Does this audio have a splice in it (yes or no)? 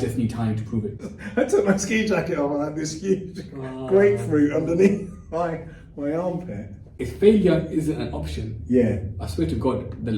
yes